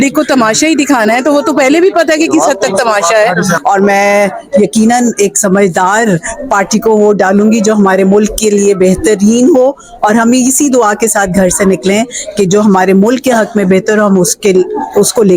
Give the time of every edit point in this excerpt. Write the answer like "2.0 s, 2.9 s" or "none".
3.6 s